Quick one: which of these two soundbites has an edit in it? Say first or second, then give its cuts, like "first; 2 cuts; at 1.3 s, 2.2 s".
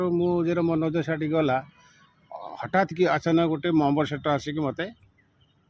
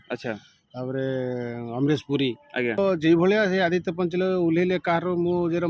second; 1 cut; at 2.8 s